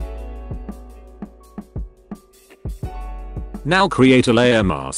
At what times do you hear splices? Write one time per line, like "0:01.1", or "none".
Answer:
0:03.6